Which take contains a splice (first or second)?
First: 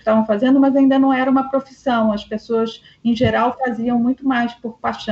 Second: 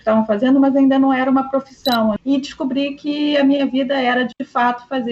second